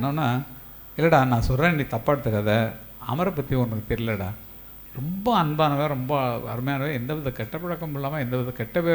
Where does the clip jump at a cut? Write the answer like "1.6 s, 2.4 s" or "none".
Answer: none